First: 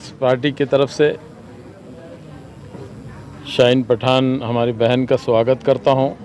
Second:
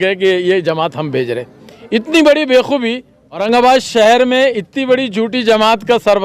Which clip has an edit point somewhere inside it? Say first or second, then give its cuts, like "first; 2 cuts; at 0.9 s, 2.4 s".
second; 1 cut; at 3.4 s